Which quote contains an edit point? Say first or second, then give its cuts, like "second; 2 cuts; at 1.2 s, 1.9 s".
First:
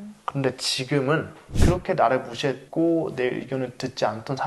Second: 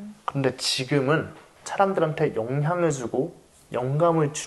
first; 1 cut; at 1.5 s